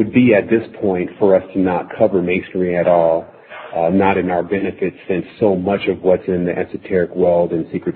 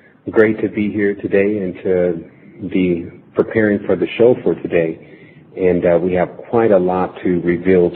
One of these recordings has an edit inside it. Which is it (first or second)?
first